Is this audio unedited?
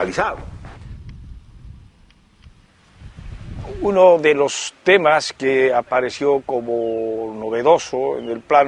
no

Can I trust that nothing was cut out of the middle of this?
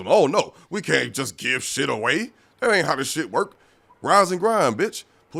yes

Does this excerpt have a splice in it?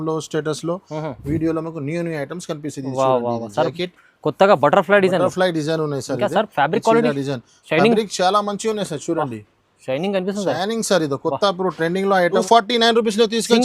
yes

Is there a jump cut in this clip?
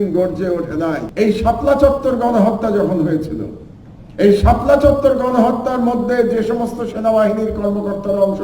yes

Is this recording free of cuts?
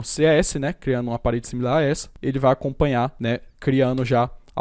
no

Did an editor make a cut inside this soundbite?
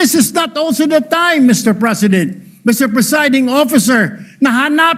no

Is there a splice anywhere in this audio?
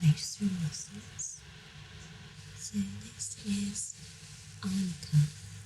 yes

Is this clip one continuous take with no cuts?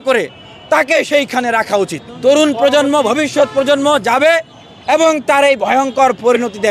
no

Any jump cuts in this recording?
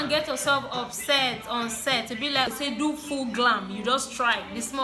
yes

